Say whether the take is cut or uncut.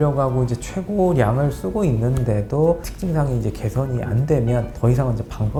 uncut